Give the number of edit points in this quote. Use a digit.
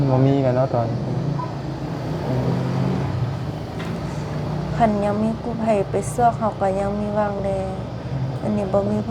0